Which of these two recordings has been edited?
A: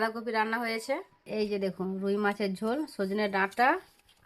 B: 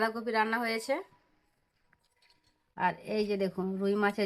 A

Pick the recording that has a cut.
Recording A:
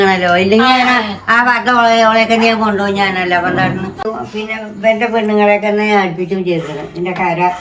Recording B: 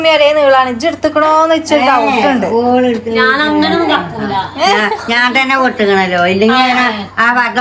A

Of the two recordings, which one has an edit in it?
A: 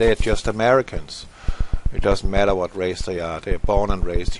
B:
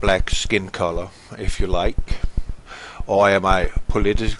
A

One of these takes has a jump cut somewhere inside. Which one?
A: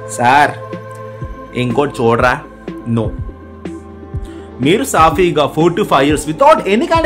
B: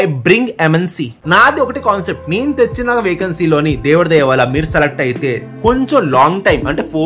B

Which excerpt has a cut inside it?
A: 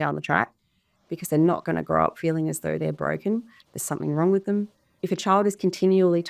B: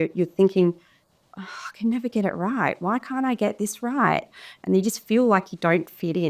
A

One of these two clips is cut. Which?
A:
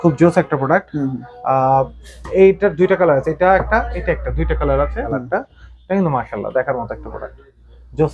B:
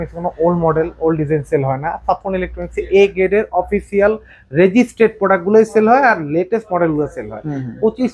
A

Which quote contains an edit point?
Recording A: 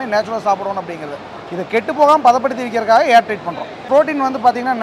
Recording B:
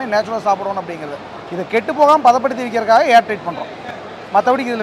A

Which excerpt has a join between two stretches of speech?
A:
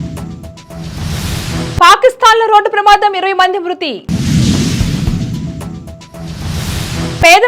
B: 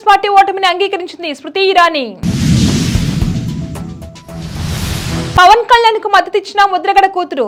A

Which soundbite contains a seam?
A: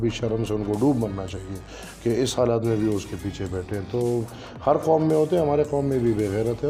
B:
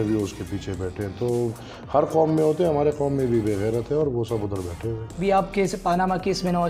B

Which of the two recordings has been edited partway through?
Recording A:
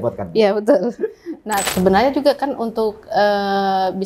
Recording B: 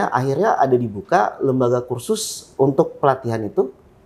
A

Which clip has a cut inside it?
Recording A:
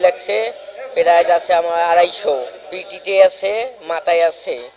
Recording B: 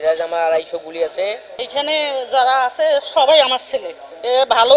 B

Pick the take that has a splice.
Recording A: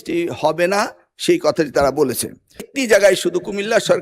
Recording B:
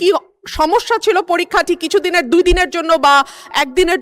A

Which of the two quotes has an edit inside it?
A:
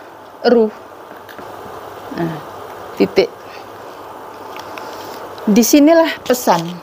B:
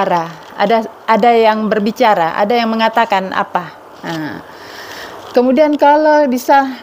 A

